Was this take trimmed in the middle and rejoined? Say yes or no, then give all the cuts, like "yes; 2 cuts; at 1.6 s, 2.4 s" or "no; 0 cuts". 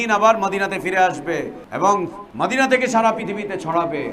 yes; 2 cuts; at 1.6 s, 2.2 s